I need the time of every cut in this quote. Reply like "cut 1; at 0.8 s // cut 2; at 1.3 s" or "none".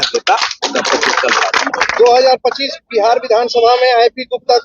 cut 1; at 1.5 s